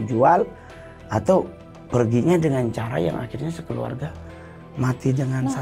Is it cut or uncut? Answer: uncut